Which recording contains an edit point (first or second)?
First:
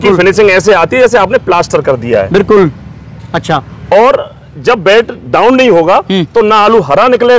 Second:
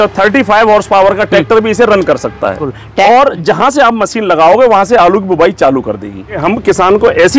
second